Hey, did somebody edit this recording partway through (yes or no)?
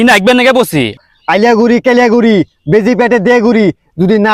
yes